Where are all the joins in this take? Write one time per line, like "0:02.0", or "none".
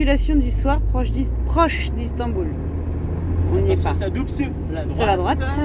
none